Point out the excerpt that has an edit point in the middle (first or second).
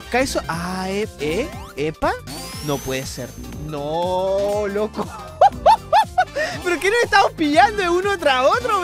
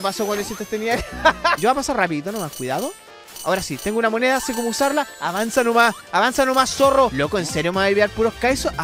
second